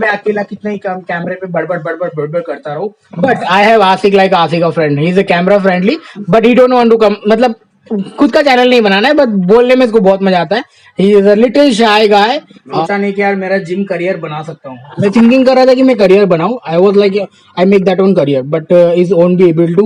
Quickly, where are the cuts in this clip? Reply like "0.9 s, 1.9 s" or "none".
12.8 s